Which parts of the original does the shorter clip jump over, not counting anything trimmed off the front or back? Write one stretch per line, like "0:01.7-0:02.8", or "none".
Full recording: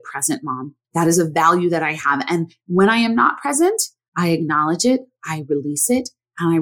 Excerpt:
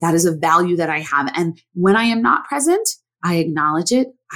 none